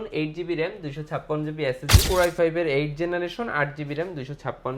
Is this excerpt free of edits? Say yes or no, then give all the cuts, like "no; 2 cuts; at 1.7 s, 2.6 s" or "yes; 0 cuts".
no; 1 cut; at 2.1 s